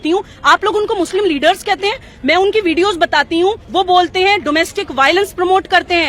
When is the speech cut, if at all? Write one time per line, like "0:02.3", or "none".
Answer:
0:03.6

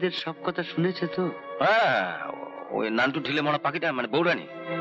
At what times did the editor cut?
none

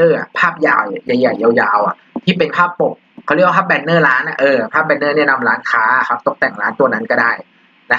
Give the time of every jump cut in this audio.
none

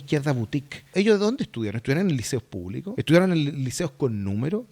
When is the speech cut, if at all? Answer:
0:00.9
0:02.9

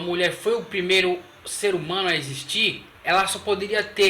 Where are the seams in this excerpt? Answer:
0:02.9

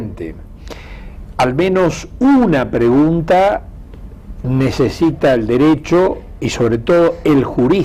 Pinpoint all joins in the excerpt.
none

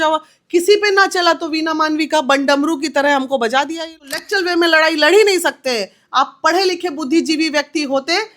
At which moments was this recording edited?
0:04.1

